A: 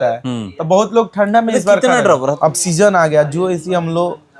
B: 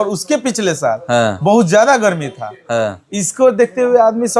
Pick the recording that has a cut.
A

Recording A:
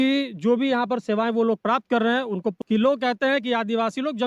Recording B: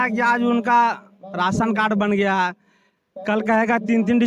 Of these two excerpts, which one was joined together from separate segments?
A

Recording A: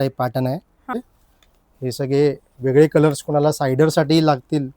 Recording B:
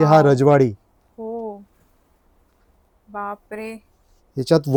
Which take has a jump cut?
A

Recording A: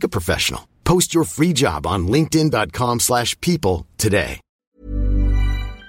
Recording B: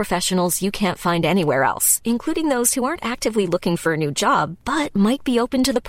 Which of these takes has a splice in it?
A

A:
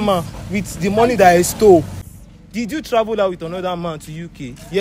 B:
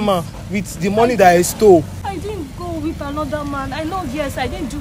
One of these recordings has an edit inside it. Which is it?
A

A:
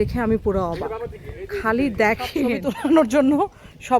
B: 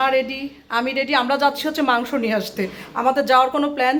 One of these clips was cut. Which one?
A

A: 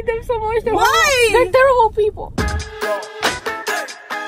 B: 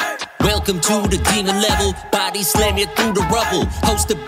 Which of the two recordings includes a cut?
A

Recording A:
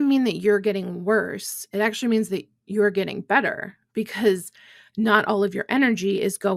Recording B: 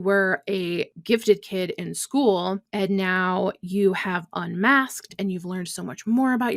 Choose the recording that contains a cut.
B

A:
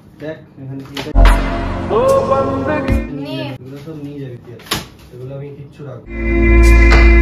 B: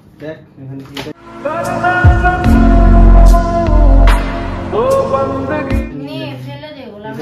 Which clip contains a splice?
A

